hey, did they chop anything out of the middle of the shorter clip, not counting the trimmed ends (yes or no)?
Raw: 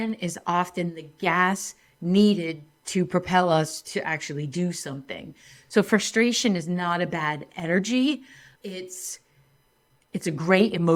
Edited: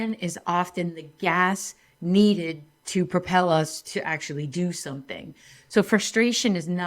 no